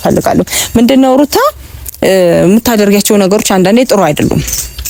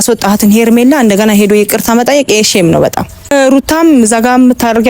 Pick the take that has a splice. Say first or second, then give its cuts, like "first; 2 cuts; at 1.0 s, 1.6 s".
second; 1 cut; at 3.3 s